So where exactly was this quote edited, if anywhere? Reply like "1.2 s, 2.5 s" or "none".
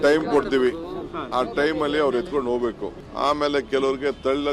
3.0 s